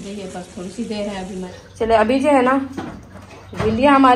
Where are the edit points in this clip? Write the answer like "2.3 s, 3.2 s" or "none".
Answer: 1.5 s